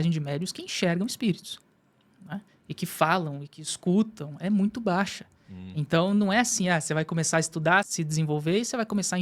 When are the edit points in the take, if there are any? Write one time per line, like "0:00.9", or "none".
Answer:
0:07.9

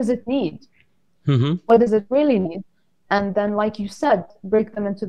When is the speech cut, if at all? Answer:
none

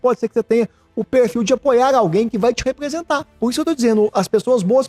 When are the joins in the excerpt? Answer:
0:03.3

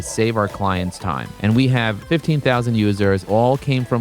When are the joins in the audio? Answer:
0:01.3
0:02.0
0:03.2

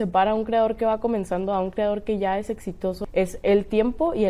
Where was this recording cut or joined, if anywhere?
0:03.0

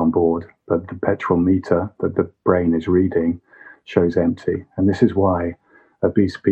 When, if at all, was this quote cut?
none

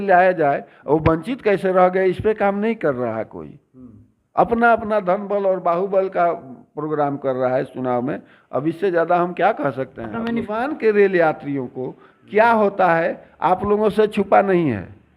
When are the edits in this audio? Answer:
0:10.5

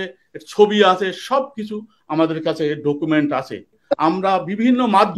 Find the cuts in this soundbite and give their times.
0:03.8

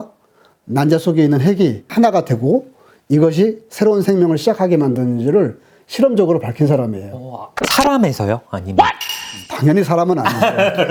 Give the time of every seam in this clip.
none

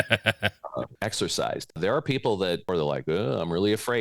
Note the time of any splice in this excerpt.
0:00.9
0:01.7
0:02.7

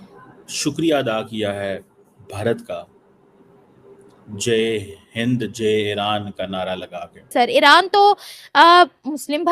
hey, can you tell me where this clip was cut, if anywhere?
0:07.3

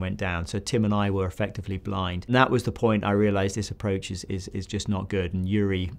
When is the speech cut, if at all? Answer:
0:02.3

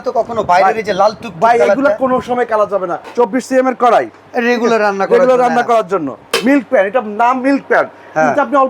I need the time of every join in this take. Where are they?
0:03.0
0:06.2

